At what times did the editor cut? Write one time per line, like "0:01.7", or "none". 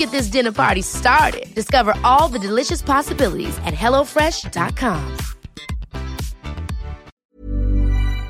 0:07.1